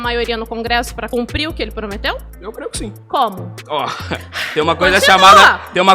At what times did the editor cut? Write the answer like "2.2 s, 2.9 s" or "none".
1.1 s, 2.6 s, 3.5 s